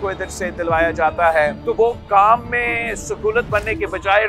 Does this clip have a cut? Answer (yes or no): yes